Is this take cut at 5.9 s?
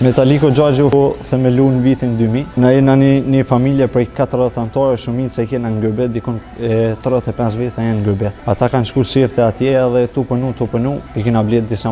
no; 4 cuts; at 0.9 s, 2.5 s, 8.4 s, 11.1 s

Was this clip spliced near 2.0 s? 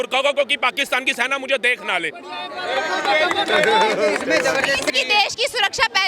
no; 1 cut; at 4.9 s

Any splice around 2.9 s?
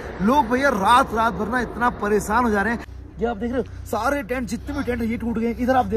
yes; 1 cut; at 2.9 s

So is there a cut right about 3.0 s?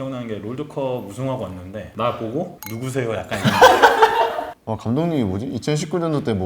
no; 1 cut; at 4.5 s

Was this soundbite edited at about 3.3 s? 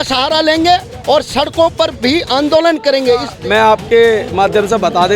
yes; 1 cut; at 3.3 s

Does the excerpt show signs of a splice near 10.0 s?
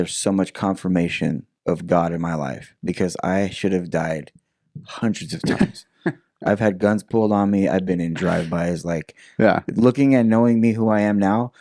no; 1 cut; at 1.5 s

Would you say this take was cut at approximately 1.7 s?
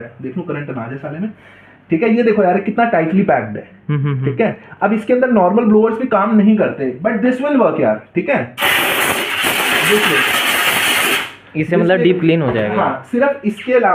no; 0 cuts

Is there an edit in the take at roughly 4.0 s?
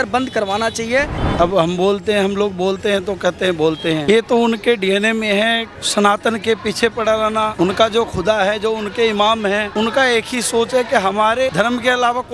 yes; 6 cuts; at 1.1 s, 4.0 s, 5.7 s, 7.5 s, 9.7 s, 11.5 s

